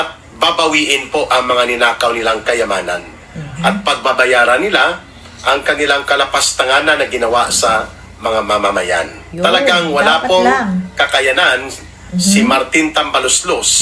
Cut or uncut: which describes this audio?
cut